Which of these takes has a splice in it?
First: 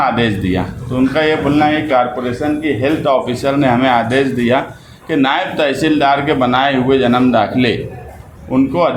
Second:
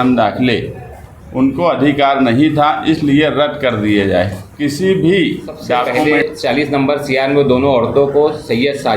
second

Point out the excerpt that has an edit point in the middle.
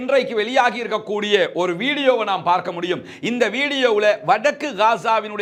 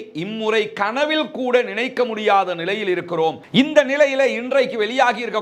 second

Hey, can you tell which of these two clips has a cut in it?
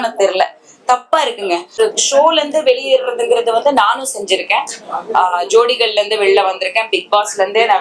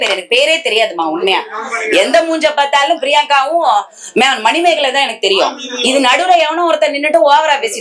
first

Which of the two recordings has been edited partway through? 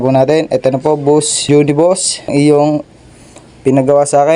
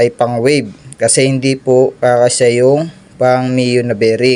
first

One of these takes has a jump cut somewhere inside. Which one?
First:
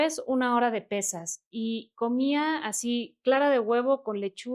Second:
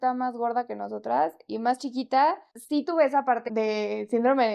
second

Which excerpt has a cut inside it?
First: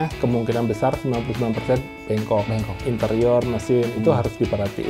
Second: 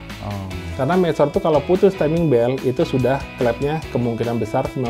first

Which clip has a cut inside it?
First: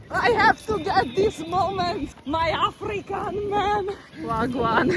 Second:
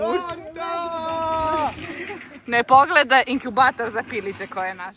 first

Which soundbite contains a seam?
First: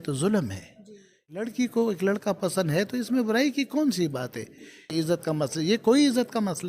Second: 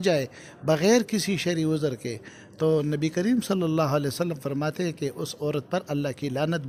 first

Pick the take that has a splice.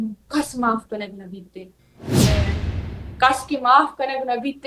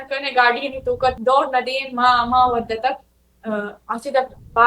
second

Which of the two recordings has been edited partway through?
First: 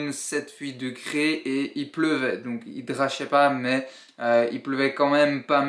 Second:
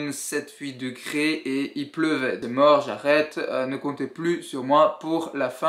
second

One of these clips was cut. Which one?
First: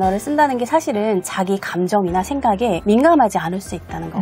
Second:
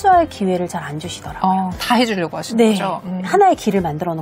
first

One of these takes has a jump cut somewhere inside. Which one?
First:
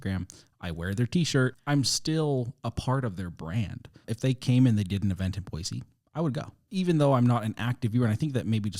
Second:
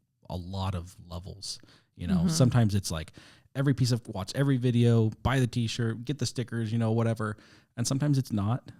first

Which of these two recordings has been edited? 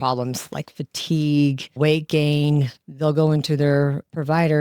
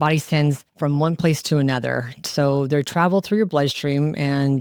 first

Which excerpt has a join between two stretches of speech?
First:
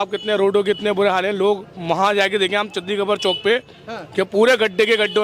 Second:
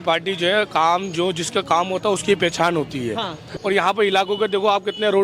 second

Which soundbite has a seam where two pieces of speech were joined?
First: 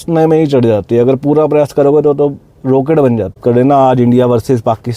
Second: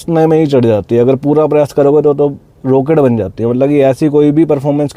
first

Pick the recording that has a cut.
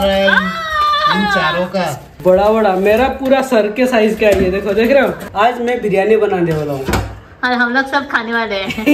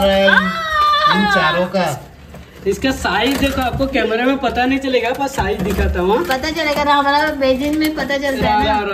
first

